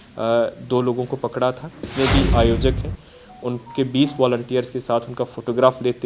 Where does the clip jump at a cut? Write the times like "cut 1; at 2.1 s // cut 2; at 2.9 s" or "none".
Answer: cut 1; at 1.9 s